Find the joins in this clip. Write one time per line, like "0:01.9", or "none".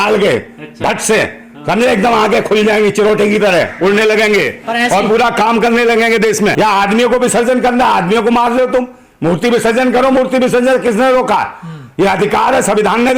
0:06.5

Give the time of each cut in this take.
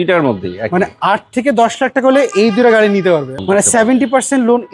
0:03.3

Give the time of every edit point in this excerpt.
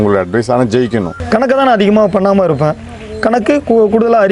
0:01.2

